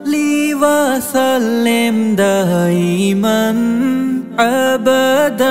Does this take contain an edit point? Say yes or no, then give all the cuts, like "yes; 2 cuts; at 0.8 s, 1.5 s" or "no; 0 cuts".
no; 0 cuts